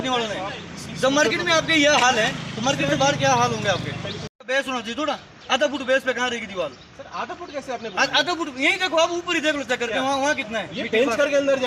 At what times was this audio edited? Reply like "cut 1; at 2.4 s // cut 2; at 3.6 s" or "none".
cut 1; at 4.1 s